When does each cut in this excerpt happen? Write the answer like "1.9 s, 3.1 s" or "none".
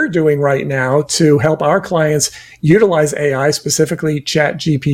none